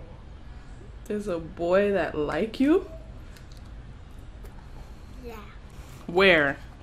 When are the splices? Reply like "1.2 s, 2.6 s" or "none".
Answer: 5.7 s